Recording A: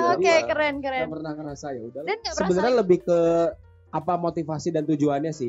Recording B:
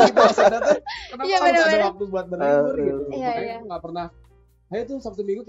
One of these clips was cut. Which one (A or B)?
A